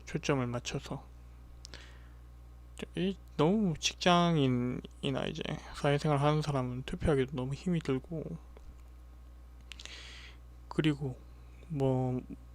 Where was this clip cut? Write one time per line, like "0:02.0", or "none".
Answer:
0:02.6